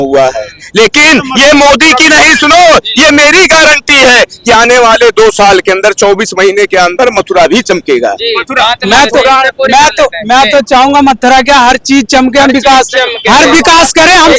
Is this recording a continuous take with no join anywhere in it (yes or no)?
yes